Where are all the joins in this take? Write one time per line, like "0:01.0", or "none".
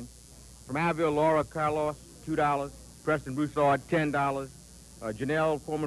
0:03.9